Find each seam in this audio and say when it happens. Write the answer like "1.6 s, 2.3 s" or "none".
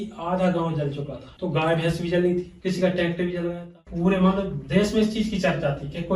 1.2 s, 3.8 s